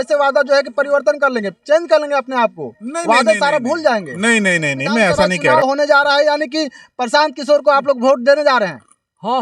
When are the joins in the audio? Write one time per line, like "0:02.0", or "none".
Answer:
0:05.6